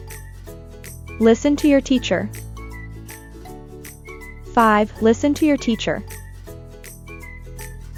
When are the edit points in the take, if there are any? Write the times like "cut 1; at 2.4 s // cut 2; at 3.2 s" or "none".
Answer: none

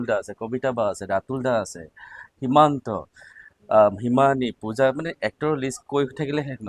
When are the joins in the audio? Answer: none

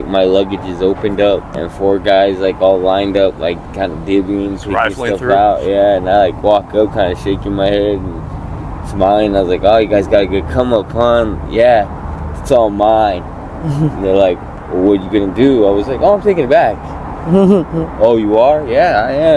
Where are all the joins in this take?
cut 1; at 1.5 s

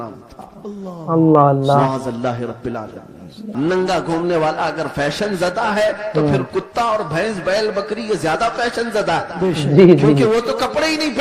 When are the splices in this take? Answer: cut 1; at 3.4 s

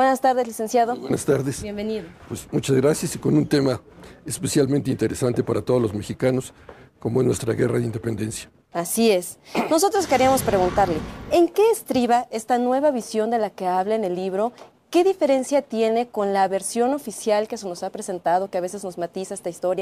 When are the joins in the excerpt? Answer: cut 1; at 8.7 s

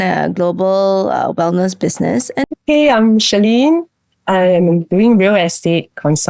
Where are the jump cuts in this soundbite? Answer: cut 1; at 2.4 s

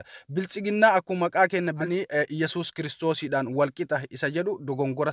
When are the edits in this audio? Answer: cut 1; at 1.9 s

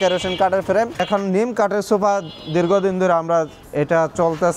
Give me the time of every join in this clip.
cut 1; at 1.0 s // cut 2; at 3.6 s

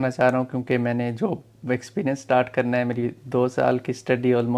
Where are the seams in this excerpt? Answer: none

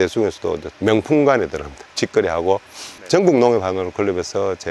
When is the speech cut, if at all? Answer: cut 1; at 1.8 s

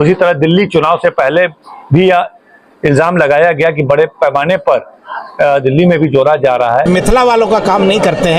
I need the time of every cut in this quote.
cut 1; at 6.9 s

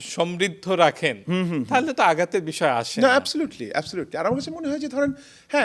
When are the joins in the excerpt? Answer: none

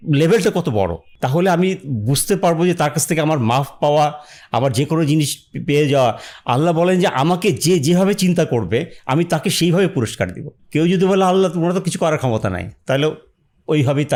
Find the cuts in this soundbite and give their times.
none

